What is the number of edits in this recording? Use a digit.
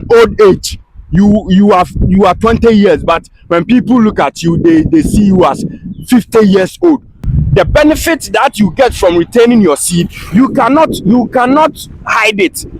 1